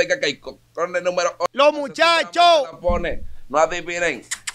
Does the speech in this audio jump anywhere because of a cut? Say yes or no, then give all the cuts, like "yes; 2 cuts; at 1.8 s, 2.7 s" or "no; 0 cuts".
yes; 1 cut; at 1.5 s